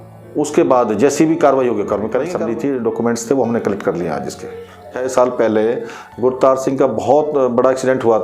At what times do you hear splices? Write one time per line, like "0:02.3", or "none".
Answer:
0:02.3
0:05.0